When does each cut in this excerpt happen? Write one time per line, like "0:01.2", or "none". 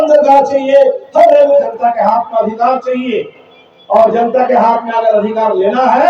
0:01.7